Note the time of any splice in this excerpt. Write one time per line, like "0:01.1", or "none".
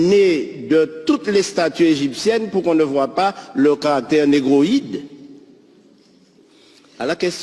0:06.4